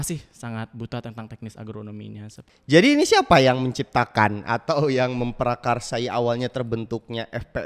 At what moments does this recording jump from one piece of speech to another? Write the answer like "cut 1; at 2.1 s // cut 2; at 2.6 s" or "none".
cut 1; at 2.4 s